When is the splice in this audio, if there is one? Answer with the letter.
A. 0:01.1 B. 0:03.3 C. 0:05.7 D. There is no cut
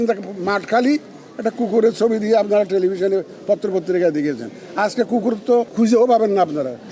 C